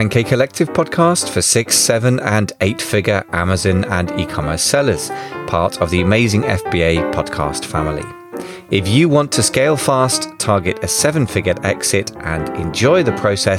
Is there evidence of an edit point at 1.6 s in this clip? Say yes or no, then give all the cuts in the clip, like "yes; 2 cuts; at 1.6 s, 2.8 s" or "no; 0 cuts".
no; 0 cuts